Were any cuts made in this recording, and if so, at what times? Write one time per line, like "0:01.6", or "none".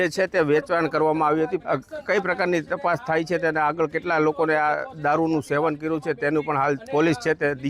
0:01.6